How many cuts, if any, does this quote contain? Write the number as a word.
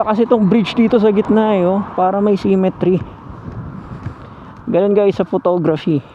zero